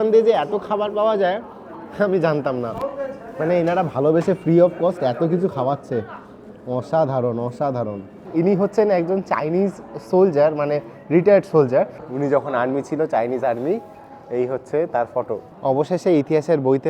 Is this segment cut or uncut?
cut